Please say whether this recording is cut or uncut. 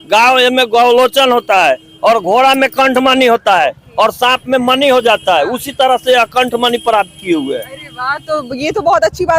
uncut